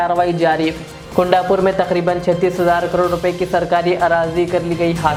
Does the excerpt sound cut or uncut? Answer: uncut